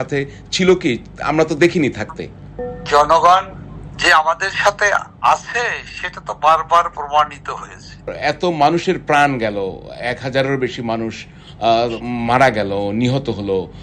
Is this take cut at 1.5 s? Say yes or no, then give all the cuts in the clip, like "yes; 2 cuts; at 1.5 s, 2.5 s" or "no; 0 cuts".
no; 1 cut; at 8.1 s